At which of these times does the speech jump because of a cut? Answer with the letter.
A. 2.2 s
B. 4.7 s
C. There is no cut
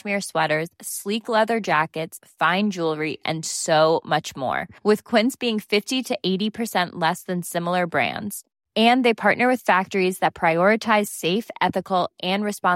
C